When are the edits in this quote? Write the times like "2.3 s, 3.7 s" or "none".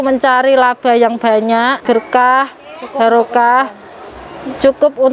1.8 s